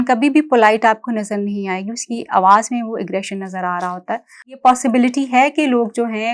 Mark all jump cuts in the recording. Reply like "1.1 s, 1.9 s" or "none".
4.6 s